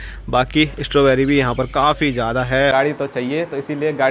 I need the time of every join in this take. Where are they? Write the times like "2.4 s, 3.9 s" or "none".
2.7 s